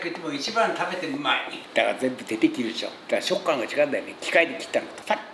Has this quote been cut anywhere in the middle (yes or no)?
no